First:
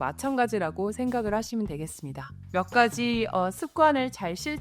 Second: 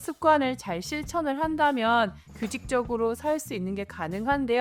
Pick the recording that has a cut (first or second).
first